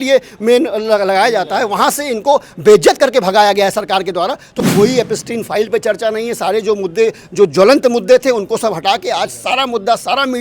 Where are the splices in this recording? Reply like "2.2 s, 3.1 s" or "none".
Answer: 4.6 s